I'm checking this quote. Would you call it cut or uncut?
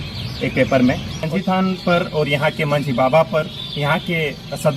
cut